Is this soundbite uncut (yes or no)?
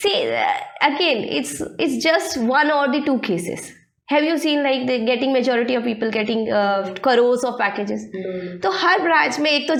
yes